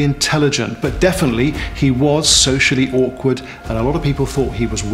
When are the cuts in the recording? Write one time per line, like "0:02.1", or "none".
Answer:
none